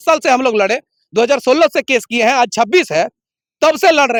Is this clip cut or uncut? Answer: uncut